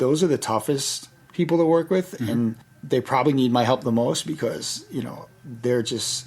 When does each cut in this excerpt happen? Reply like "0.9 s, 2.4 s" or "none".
2.7 s